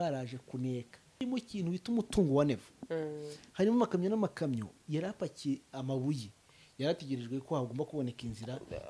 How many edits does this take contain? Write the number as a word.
one